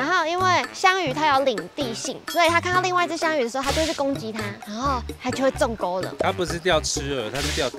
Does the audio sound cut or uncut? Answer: cut